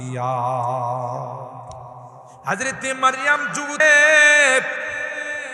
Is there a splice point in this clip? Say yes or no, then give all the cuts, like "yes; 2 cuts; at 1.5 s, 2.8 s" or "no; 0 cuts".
yes; 1 cut; at 3.8 s